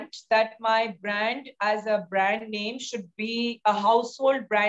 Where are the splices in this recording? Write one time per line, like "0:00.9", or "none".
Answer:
none